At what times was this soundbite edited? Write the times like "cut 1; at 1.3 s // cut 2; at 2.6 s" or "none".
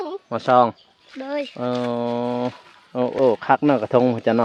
none